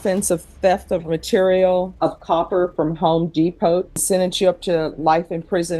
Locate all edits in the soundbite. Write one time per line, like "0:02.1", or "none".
0:01.9
0:04.0